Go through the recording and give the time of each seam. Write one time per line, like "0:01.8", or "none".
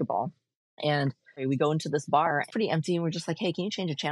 0:01.4
0:02.5